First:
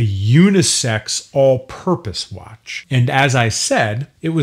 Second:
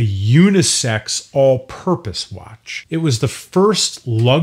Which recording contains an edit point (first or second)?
second